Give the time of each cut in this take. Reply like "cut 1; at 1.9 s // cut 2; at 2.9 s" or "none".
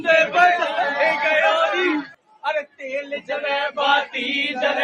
cut 1; at 2.1 s